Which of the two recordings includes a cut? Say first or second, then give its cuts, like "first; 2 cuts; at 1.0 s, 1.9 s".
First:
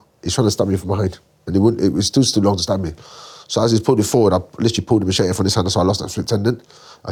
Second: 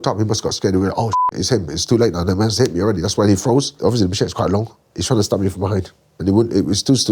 second; 1 cut; at 3.7 s